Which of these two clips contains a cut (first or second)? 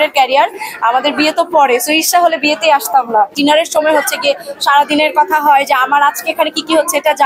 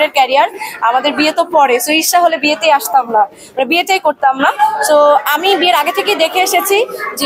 first